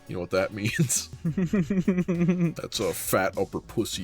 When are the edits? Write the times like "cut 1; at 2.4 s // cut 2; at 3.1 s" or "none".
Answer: cut 1; at 1.0 s // cut 2; at 2.6 s